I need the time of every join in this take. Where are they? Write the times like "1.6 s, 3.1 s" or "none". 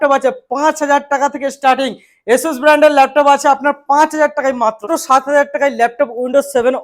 4.8 s